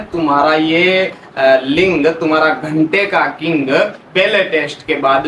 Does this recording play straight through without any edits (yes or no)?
yes